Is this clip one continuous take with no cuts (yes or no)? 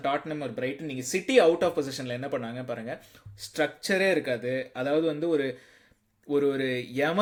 yes